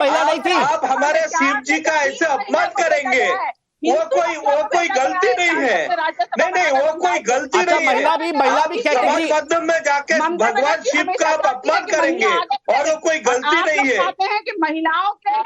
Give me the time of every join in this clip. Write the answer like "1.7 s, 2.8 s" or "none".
6.7 s